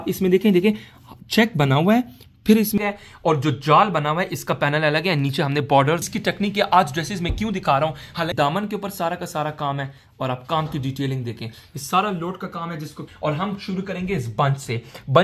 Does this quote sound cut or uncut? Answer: cut